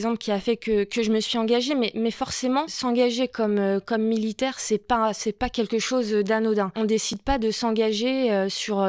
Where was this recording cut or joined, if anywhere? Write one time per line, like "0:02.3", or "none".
0:02.7
0:06.7